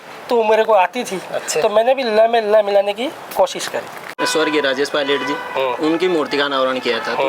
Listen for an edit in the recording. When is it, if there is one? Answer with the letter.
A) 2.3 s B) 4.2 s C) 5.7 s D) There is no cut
B